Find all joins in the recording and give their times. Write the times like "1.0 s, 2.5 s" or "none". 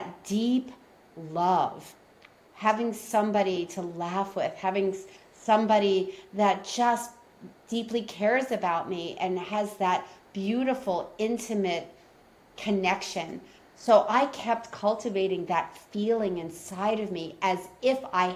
none